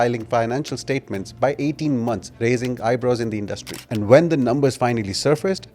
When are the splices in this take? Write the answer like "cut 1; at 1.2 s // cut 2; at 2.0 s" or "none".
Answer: none

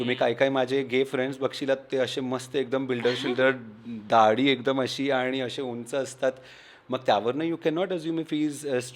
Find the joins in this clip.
none

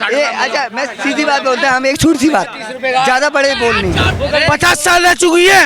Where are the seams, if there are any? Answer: cut 1; at 4.1 s

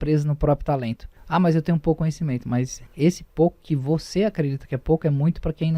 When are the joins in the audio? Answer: cut 1; at 1.1 s // cut 2; at 2.8 s

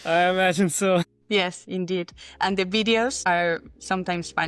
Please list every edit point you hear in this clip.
cut 1; at 1.3 s // cut 2; at 3.2 s

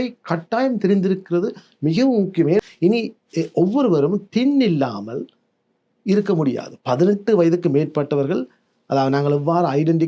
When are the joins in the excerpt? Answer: cut 1; at 2.6 s

